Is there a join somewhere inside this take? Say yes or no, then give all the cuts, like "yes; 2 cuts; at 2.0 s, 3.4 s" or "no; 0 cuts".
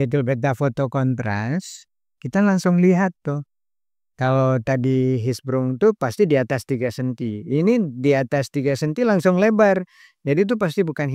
no; 0 cuts